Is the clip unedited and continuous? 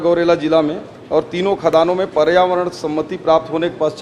yes; 0 cuts

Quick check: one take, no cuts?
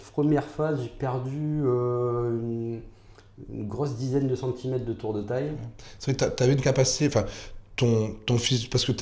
yes; 0 cuts

